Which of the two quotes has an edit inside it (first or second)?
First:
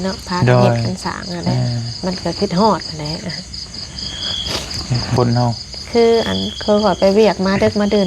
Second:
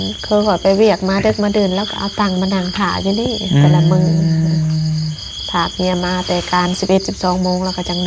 first